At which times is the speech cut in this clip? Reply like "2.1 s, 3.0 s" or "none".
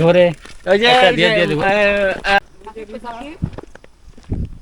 2.5 s